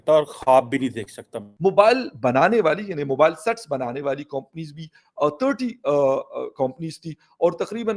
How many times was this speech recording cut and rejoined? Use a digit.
1